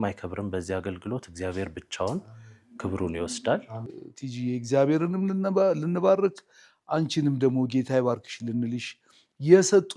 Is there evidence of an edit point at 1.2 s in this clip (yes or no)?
no